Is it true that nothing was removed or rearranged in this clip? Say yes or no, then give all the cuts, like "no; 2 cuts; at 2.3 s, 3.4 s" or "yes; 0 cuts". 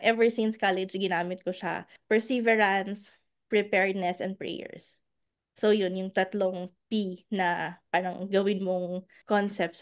no; 1 cut; at 1.9 s